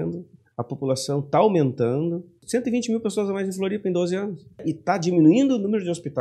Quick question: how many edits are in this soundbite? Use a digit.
2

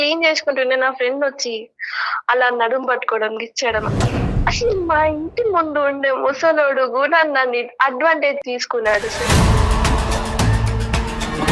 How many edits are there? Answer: 2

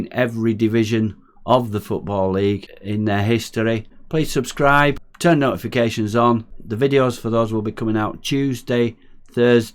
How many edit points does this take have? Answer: 4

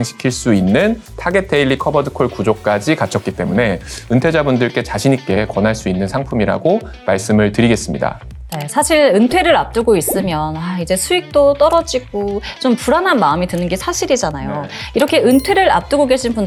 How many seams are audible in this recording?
0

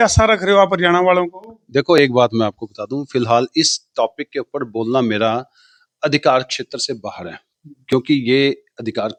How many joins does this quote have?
0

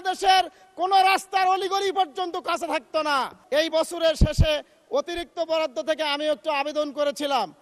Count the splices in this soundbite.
1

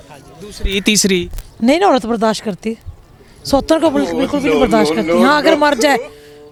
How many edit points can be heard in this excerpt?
0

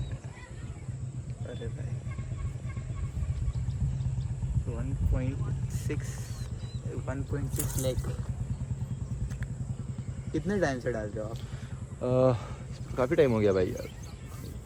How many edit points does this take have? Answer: 0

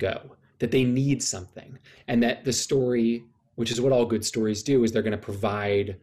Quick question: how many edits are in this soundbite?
0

